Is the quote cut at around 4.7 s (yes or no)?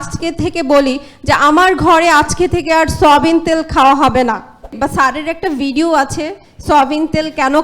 yes